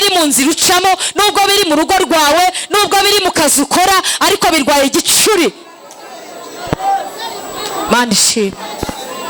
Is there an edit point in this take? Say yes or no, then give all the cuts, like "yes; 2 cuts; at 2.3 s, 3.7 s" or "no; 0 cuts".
no; 0 cuts